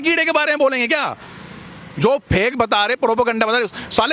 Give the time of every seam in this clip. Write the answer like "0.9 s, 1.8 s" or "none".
none

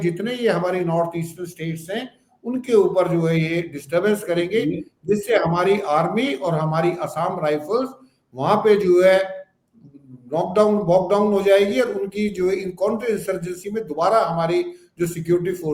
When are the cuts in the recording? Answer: none

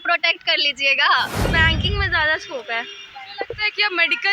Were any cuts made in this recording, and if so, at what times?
1.4 s

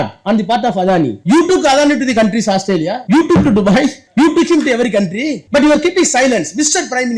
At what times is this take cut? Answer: 1.2 s, 3.0 s, 4.0 s, 5.3 s

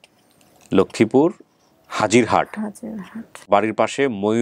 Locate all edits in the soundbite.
3.4 s

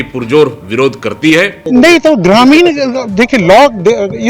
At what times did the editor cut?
1.6 s

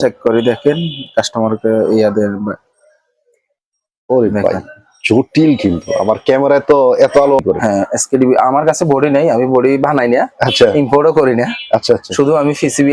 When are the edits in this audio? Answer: 7.4 s

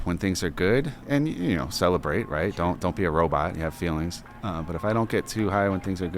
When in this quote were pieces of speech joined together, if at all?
1.0 s

